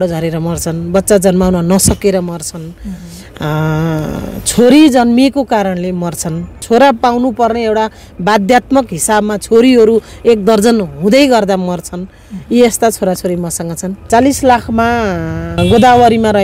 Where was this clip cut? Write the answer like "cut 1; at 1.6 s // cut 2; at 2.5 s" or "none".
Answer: cut 1; at 6.6 s // cut 2; at 14.1 s // cut 3; at 15.5 s

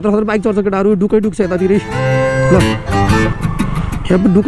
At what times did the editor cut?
none

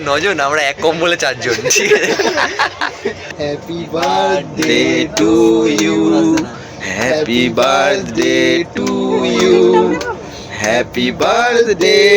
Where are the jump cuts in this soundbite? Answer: cut 1; at 3.2 s

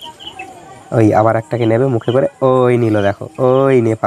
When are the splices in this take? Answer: none

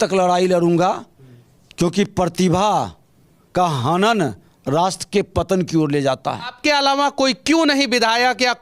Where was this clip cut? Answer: cut 1; at 6.5 s

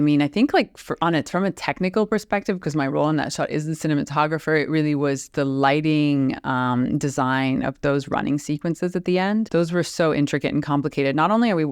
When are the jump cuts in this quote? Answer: cut 1; at 9.5 s

